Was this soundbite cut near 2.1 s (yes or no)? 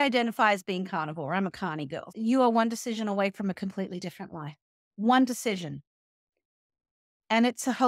yes